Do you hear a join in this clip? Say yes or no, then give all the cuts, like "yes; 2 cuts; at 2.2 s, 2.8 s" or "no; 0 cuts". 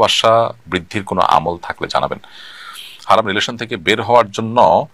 yes; 1 cut; at 2.5 s